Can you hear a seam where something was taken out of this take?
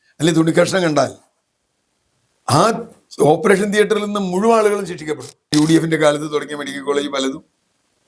yes; 1 cut; at 5.5 s

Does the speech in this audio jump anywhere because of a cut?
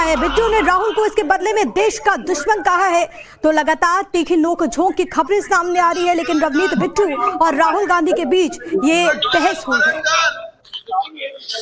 no; 0 cuts

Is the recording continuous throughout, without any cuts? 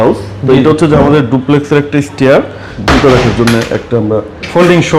no; 1 cut; at 2.8 s

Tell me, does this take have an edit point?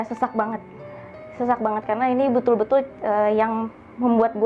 no; 0 cuts

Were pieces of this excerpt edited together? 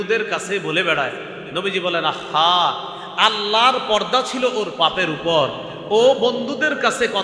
no; 0 cuts

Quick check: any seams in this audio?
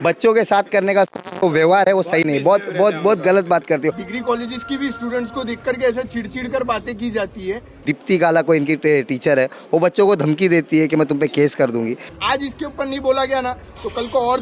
yes; 3 cuts; at 4.0 s, 7.8 s, 12.1 s

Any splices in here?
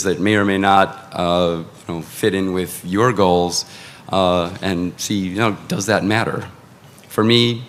no; 0 cuts

